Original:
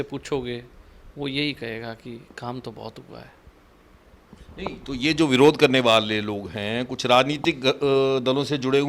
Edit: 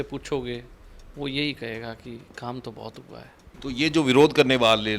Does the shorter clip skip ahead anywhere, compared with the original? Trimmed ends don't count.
yes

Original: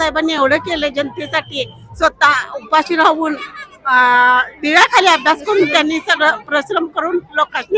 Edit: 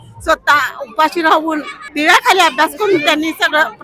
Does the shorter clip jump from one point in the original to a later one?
yes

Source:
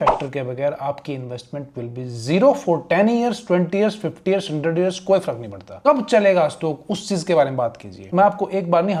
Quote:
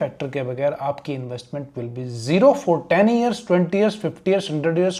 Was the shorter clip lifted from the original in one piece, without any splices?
yes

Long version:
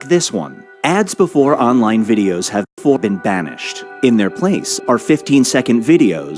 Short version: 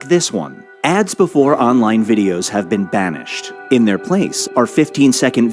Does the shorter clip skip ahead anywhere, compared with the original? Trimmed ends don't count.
yes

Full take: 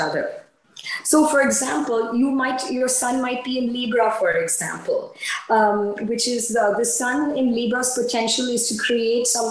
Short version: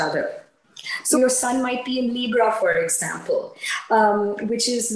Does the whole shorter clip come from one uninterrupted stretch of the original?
no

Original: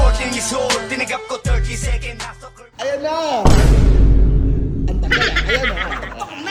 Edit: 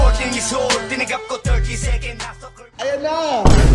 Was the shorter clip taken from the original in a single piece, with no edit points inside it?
yes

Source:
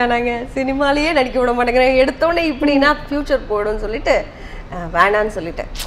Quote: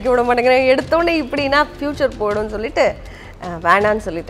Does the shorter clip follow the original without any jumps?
yes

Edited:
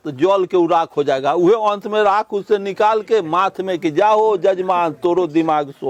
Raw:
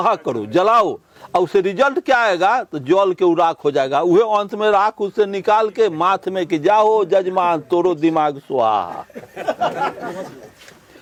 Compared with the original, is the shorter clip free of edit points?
yes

